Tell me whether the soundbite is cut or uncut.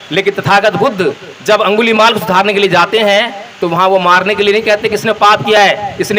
uncut